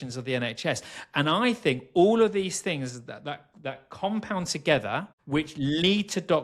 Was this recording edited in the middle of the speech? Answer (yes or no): yes